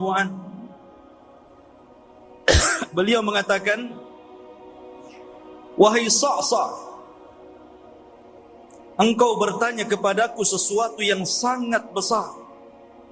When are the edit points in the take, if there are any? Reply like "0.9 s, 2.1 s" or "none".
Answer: 1.0 s, 2.4 s, 4.3 s, 5.8 s, 7.0 s, 8.9 s